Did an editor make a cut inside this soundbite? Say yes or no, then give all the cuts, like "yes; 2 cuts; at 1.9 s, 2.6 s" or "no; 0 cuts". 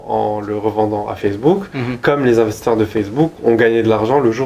no; 0 cuts